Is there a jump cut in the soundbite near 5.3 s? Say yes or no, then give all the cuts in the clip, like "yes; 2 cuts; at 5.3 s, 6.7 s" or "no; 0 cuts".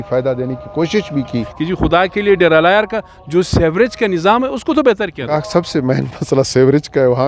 yes; 2 cuts; at 1.5 s, 5.3 s